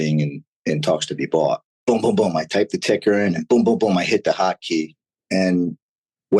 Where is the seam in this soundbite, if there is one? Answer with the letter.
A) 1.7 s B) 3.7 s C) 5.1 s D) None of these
A